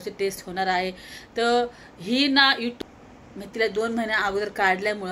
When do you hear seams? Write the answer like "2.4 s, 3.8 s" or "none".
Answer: 2.8 s